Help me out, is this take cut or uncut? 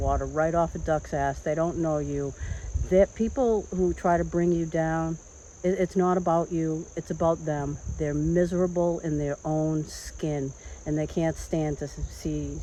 uncut